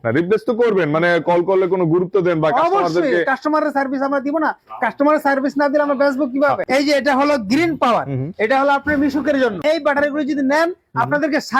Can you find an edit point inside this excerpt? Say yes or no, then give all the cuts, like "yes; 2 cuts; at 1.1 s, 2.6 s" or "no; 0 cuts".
yes; 2 cuts; at 6.6 s, 9.6 s